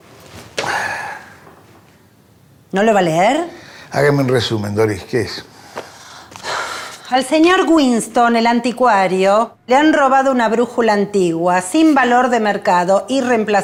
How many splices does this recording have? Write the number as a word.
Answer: zero